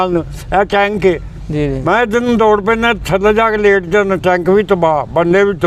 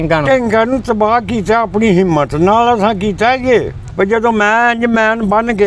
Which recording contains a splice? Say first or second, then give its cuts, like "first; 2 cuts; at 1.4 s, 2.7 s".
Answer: second; 1 cut; at 3.8 s